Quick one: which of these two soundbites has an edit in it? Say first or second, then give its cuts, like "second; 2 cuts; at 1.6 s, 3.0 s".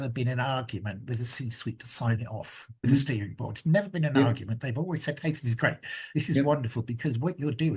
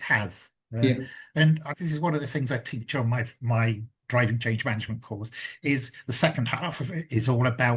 first; 1 cut; at 2.8 s